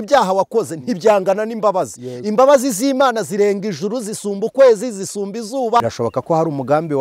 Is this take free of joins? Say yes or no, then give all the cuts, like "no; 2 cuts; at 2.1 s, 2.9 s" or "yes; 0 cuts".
no; 1 cut; at 5.8 s